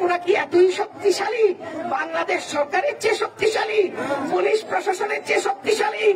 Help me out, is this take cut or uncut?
uncut